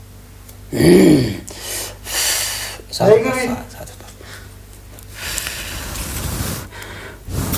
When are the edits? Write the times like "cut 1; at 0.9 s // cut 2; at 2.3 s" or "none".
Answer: none